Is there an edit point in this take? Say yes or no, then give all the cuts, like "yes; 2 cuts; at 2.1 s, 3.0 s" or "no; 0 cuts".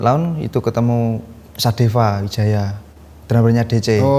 yes; 1 cut; at 2.8 s